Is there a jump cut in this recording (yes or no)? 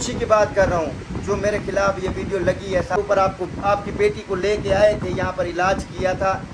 yes